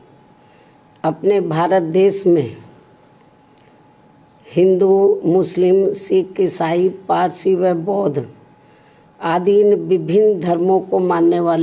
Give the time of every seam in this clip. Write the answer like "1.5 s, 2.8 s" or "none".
none